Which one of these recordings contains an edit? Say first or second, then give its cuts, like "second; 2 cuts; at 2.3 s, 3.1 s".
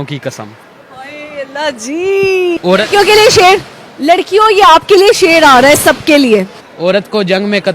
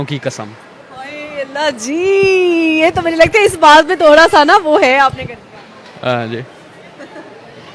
first; 1 cut; at 2.6 s